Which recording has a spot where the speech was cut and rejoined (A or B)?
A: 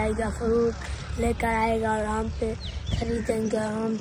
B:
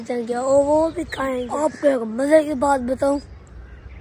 B